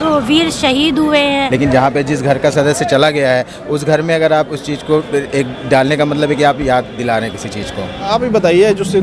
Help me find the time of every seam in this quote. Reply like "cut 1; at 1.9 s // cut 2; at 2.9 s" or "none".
cut 1; at 1.5 s // cut 2; at 8.1 s